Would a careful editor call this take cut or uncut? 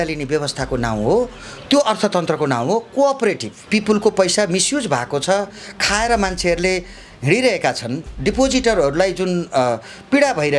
cut